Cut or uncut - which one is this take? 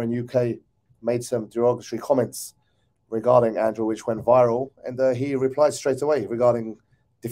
uncut